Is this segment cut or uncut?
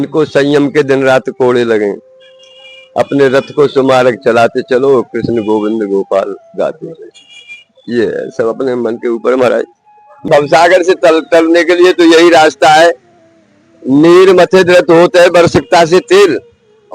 cut